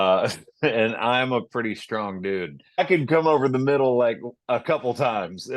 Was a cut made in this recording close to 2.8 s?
yes; 1 cut; at 2.8 s

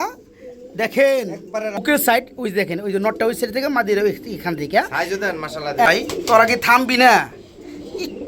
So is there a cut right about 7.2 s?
no; 2 cuts; at 1.8 s, 5.9 s

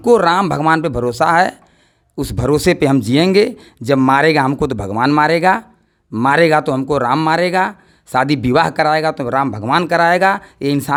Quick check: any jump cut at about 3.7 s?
no; 0 cuts

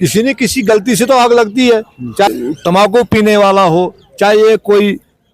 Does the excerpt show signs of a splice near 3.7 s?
no; 1 cut; at 2.3 s

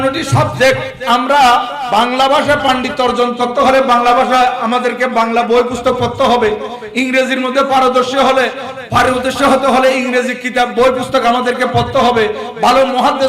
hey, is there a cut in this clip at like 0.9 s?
yes; 2 cuts; at 0.9 s, 1.8 s

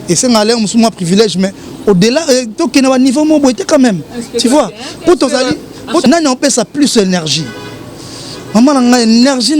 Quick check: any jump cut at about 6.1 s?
yes; 1 cut; at 6.1 s

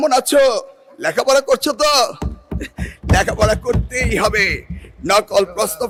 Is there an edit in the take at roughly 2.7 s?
no; 0 cuts

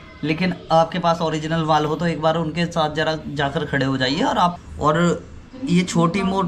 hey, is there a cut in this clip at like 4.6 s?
yes; 1 cut; at 4.6 s

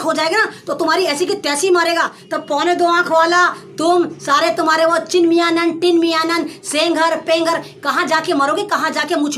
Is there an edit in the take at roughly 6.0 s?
no; 1 cut; at 2.2 s

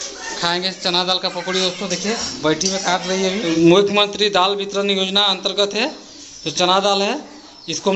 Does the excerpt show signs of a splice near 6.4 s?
no; 1 cut; at 3.4 s

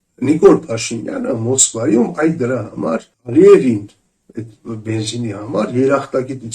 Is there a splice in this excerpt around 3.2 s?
yes; 1 cut; at 3.2 s

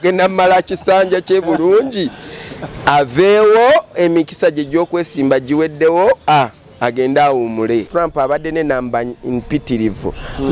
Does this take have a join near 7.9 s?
yes; 1 cut; at 7.9 s

